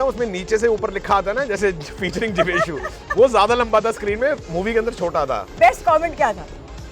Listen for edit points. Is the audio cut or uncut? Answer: cut